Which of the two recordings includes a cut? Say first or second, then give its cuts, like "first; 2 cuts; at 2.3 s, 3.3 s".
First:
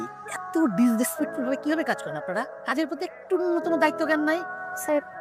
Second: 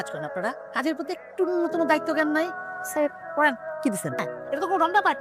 second; 1 cut; at 4.2 s